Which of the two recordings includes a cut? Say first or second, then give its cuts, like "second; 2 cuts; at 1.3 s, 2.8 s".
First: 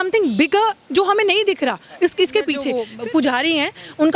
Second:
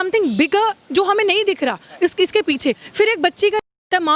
first; 1 cut; at 2.8 s